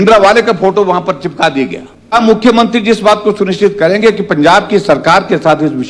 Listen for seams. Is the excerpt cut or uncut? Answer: cut